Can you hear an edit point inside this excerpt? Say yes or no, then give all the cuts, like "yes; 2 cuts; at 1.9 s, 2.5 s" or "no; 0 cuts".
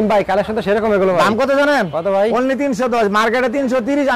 no; 0 cuts